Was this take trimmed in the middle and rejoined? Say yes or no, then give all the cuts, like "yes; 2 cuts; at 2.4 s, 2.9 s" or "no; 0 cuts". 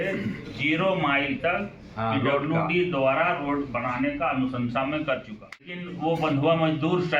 yes; 1 cut; at 5.6 s